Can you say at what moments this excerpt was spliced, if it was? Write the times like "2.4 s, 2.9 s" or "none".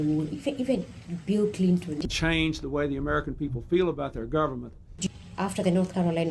2.1 s, 5.1 s

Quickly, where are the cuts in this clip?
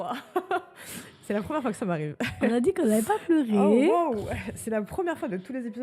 none

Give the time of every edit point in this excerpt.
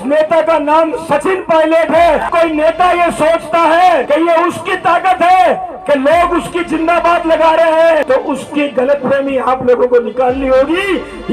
2.3 s, 4.0 s, 8.0 s

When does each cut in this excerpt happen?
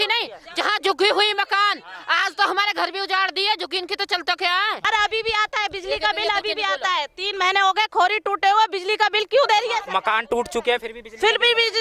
4.9 s

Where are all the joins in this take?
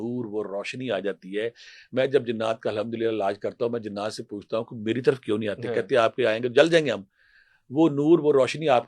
none

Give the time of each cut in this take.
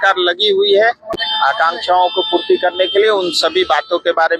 none

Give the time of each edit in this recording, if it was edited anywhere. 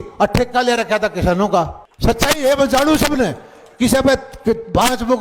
1.8 s

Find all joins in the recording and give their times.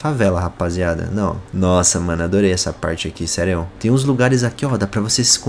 1.4 s, 3.7 s

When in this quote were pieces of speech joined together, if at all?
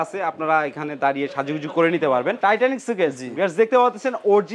2.4 s

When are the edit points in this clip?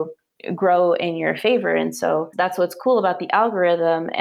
2.3 s

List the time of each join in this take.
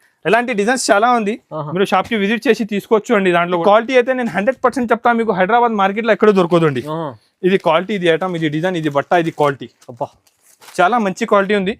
3.6 s

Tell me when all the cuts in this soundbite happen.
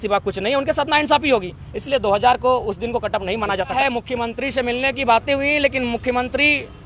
3.8 s

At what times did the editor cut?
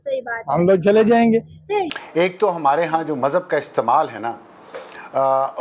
2.0 s

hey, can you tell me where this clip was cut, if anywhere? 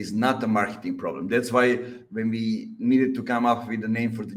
none

